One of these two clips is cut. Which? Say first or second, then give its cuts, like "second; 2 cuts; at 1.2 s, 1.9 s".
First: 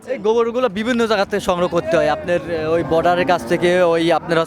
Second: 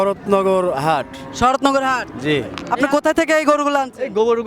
second; 1 cut; at 2.6 s